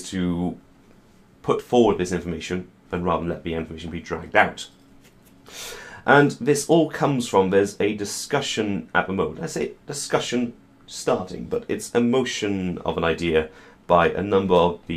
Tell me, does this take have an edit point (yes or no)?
no